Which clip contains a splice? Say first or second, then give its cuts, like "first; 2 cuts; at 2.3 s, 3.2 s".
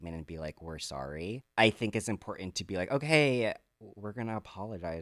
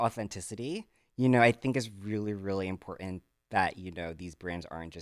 first; 1 cut; at 1.4 s